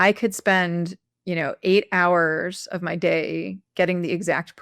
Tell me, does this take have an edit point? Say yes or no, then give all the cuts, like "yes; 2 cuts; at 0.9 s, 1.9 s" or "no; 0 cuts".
no; 0 cuts